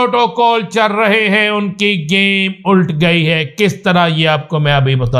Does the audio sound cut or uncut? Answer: uncut